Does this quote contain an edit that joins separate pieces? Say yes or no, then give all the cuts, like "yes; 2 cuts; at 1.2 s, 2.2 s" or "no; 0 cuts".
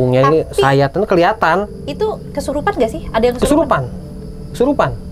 yes; 1 cut; at 2.3 s